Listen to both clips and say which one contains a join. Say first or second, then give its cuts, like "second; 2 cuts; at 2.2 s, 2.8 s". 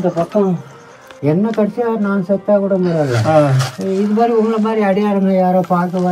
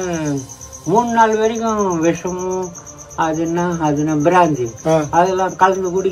first; 1 cut; at 1.1 s